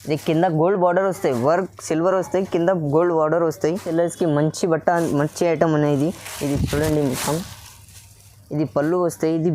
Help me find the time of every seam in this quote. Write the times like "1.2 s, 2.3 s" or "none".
3.9 s

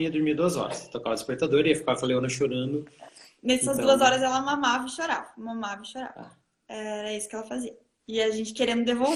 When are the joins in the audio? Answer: none

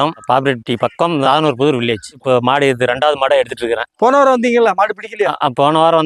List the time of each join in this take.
none

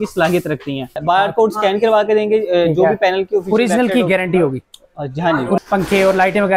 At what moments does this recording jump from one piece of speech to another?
1.0 s, 5.6 s

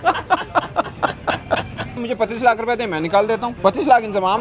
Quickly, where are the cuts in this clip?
2.1 s, 3.5 s

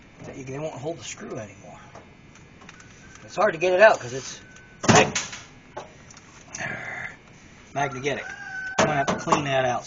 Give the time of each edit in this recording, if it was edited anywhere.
none

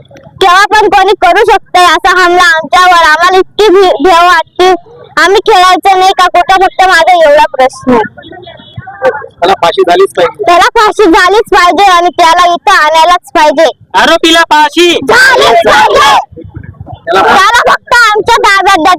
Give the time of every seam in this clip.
none

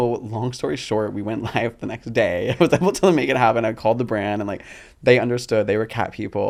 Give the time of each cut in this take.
none

